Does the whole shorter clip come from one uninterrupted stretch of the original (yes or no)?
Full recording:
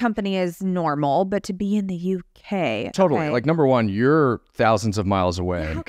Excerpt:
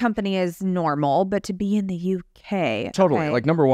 yes